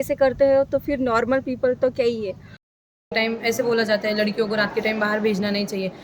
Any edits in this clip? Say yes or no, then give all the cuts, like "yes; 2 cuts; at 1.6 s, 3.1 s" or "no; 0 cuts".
yes; 1 cut; at 2.8 s